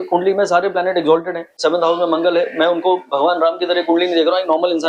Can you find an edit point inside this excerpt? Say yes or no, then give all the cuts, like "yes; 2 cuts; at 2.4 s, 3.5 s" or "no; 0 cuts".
yes; 1 cut; at 1.5 s